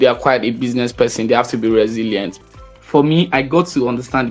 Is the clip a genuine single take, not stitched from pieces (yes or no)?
no